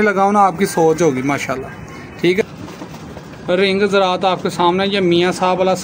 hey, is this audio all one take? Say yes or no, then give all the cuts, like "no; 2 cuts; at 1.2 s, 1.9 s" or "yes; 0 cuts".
no; 1 cut; at 2.4 s